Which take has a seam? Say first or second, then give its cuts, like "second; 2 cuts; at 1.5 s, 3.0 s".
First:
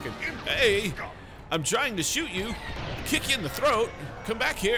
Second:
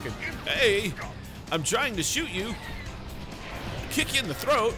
first; 1 cut; at 2.8 s